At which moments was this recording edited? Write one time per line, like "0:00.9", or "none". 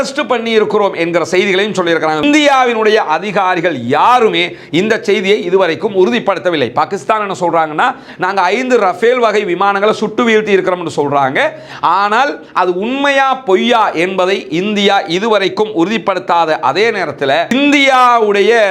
none